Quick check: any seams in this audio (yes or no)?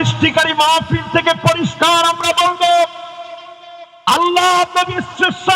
no